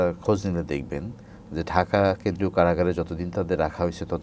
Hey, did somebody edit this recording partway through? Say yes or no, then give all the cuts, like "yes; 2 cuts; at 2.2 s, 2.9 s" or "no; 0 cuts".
no; 0 cuts